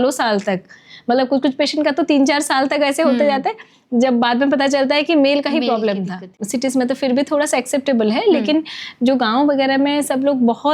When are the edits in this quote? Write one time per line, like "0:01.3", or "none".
0:06.4